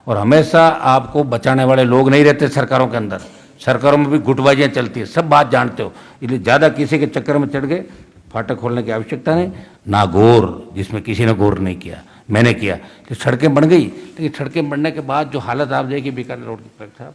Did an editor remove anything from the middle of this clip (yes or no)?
yes